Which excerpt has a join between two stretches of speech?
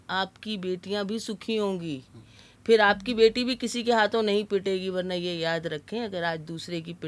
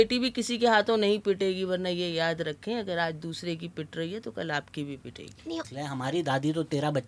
second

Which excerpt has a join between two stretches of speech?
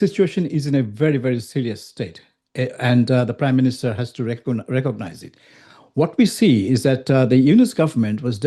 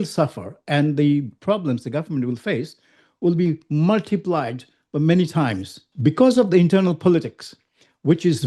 second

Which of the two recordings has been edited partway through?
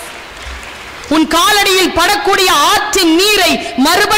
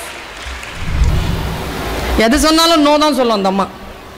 second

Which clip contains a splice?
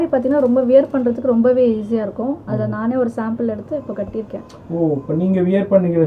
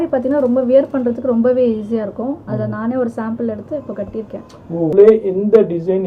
second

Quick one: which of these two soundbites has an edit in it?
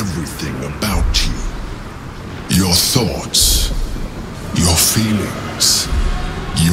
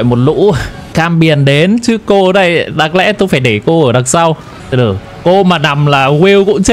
second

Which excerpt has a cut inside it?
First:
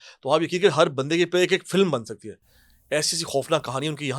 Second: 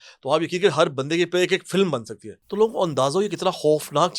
second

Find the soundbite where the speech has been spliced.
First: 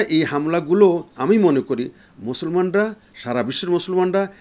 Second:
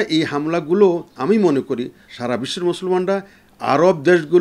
second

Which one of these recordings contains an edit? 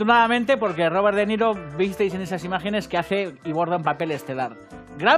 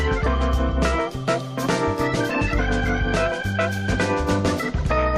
first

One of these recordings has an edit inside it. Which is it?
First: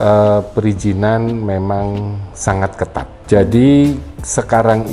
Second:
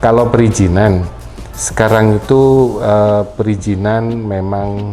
first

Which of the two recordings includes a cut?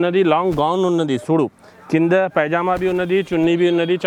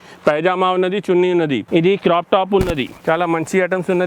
second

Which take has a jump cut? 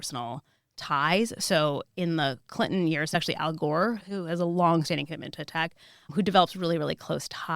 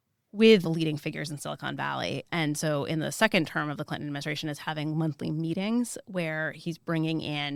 first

